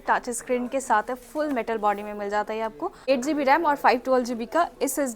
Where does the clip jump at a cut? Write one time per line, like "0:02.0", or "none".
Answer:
0:03.1